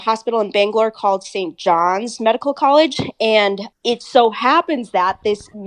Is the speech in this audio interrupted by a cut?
yes; 1 cut; at 3.7 s

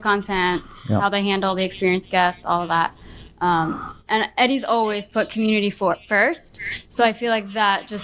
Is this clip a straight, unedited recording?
yes; 0 cuts

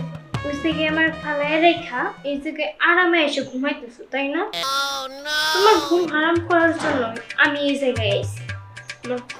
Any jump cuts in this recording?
no; 0 cuts

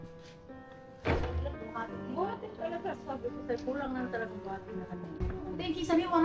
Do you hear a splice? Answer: yes; 1 cut; at 5.2 s

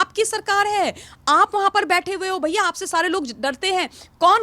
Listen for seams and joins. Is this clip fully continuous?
yes; 0 cuts

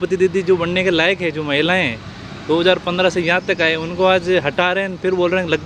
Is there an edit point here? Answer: no; 0 cuts

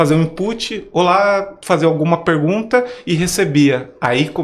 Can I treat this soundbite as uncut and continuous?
yes; 0 cuts

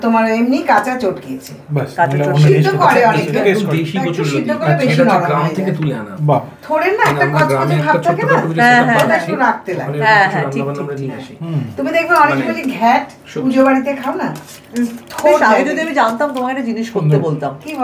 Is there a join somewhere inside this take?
no; 0 cuts

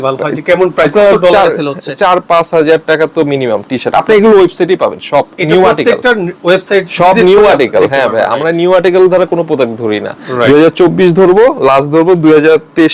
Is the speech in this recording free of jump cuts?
yes; 0 cuts

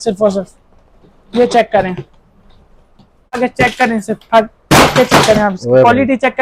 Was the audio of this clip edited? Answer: yes; 1 cut; at 3.4 s

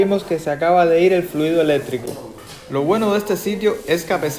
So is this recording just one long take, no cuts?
yes; 0 cuts

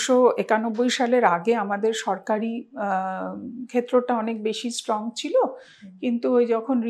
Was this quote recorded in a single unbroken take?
yes; 0 cuts

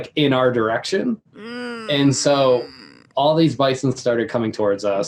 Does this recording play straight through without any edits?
yes; 0 cuts

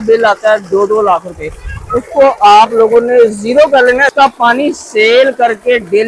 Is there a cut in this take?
yes; 1 cut; at 4.1 s

